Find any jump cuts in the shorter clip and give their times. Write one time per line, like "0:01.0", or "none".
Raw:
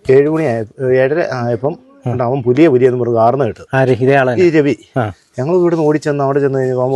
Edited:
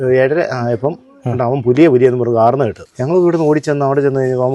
0:02.8